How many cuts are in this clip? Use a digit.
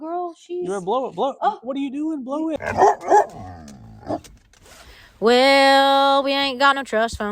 1